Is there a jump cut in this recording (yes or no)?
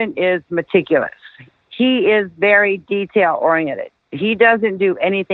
yes